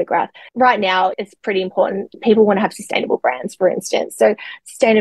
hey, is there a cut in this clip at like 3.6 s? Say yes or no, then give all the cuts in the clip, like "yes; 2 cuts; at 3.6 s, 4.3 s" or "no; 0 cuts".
no; 1 cut; at 1.1 s